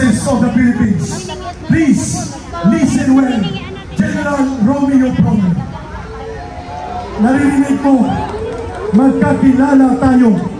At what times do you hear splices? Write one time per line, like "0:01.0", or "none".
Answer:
none